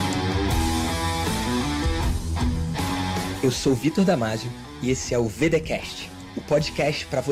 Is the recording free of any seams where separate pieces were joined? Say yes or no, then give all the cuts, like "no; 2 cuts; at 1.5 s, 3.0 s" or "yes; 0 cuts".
yes; 0 cuts